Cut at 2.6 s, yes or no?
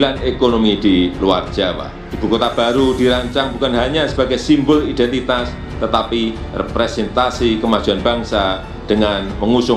no